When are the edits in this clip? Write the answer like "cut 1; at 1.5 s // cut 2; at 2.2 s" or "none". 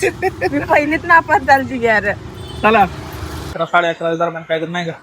cut 1; at 3.4 s